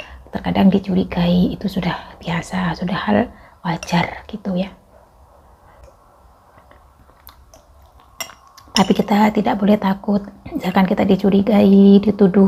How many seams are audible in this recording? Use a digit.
0